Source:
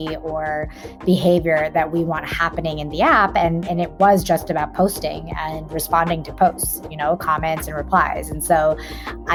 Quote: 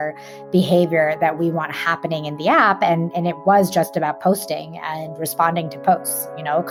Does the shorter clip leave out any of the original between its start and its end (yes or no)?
no